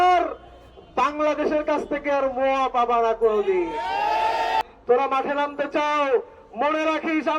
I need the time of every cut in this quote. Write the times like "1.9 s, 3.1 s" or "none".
4.6 s

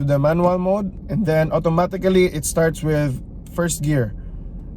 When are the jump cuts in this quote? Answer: 1.0 s

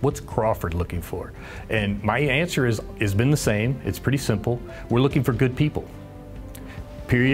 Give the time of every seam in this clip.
none

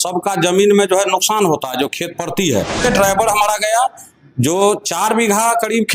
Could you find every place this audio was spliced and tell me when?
2.8 s

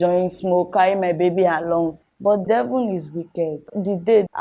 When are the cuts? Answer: 2.0 s

